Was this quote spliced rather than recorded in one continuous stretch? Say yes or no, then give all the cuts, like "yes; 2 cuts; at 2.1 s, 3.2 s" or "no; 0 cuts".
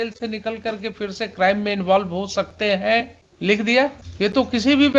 yes; 2 cuts; at 3.2 s, 4.0 s